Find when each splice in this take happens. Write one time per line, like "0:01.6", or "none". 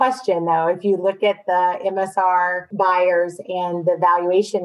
0:02.6